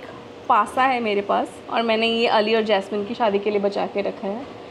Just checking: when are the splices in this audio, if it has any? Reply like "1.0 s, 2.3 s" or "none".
1.6 s, 3.1 s